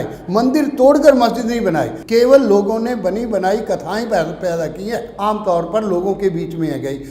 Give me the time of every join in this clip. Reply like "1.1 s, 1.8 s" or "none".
2.0 s, 5.1 s